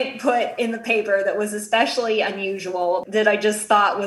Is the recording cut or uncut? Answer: cut